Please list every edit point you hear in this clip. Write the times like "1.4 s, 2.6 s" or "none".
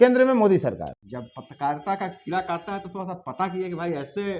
1.0 s